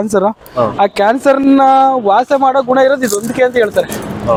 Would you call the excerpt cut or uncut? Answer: uncut